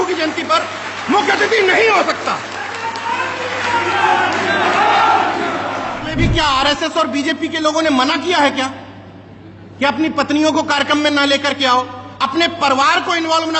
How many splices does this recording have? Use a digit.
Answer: 1